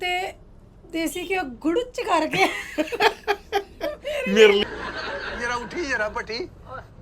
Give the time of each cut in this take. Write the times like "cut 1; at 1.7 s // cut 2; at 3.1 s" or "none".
cut 1; at 4.6 s